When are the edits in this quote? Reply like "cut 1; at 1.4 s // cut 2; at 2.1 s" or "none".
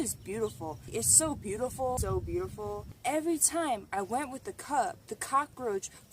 cut 1; at 0.9 s // cut 2; at 2.9 s